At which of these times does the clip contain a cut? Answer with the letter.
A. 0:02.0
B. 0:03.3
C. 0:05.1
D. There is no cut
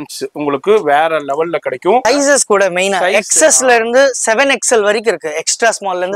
A